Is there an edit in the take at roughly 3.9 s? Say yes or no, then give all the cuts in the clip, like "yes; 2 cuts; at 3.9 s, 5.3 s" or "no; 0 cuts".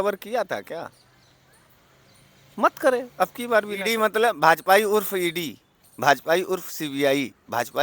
yes; 1 cut; at 3.9 s